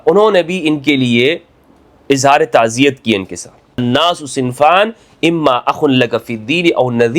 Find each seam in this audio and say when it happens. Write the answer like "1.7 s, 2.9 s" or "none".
3.8 s